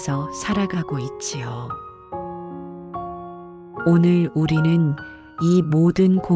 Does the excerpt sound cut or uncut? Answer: uncut